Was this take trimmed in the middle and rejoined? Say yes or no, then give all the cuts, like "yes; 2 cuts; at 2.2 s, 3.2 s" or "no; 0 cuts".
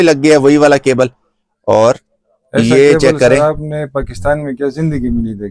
no; 0 cuts